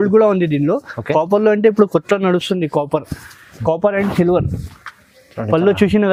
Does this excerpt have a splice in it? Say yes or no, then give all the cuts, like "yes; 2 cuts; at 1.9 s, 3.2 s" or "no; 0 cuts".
no; 0 cuts